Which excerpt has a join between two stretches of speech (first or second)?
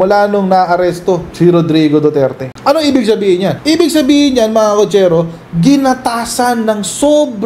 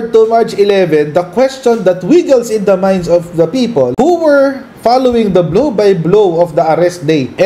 first